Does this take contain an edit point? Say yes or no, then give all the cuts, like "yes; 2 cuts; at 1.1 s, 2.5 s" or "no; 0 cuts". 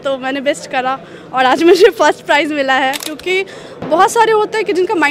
yes; 1 cut; at 3.1 s